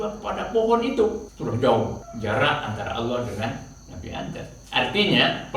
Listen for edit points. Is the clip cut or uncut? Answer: cut